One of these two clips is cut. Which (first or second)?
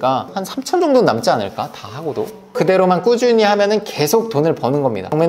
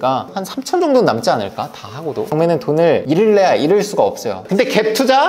second